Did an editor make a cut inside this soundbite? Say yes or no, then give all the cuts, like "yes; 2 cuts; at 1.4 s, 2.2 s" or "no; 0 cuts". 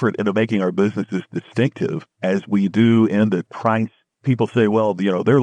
yes; 2 cuts; at 2.1 s, 3.8 s